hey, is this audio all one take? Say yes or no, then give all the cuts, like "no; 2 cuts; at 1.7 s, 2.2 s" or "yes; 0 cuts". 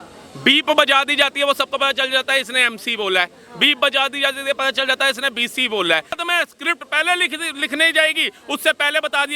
no; 1 cut; at 6.2 s